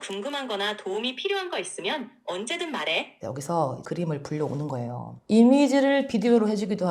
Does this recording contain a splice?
yes; 2 cuts; at 3.1 s, 3.8 s

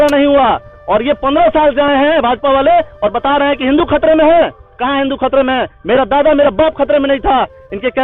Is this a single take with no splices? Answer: yes; 0 cuts

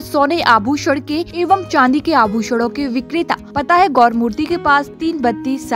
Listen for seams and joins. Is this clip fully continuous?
no; 2 cuts; at 1.3 s, 3.5 s

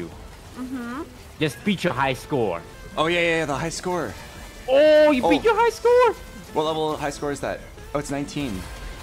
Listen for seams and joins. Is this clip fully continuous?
no; 2 cuts; at 1.2 s, 2.8 s

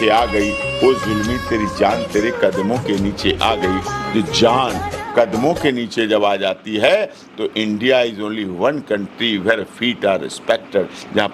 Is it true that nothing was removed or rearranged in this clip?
yes; 0 cuts

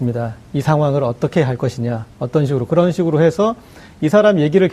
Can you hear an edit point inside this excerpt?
yes; 1 cut; at 3.2 s

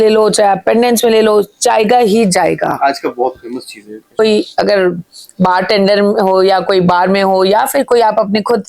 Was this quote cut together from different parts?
yes; 1 cut; at 4.2 s

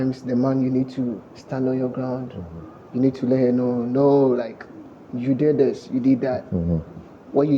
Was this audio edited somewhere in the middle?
no; 0 cuts

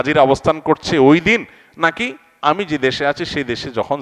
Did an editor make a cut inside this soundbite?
no; 0 cuts

